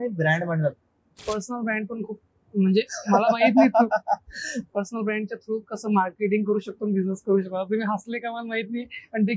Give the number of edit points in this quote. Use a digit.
2